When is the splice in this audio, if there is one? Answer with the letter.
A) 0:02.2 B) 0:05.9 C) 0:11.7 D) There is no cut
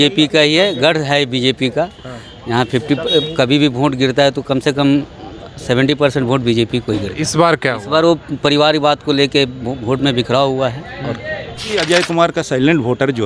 C